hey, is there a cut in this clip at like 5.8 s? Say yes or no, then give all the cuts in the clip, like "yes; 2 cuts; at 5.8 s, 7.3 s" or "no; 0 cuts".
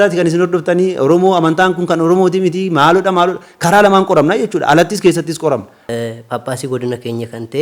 yes; 1 cut; at 5.8 s